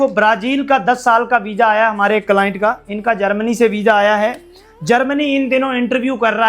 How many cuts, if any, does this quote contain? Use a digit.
1